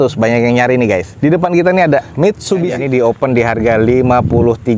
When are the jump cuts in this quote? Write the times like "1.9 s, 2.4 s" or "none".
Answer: 1.1 s, 2.8 s